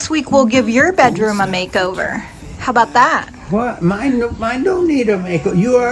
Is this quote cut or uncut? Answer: uncut